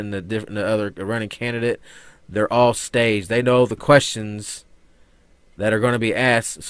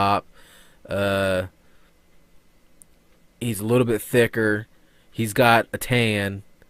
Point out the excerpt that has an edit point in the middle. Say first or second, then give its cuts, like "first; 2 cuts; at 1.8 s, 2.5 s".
second; 1 cut; at 4.2 s